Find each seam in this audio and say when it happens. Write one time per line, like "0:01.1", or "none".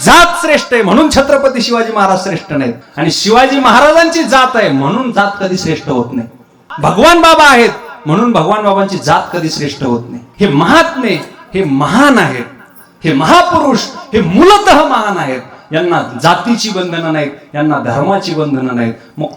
0:02.8
0:06.6
0:10.2